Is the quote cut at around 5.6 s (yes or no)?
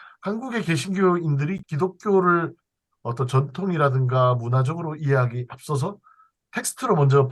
no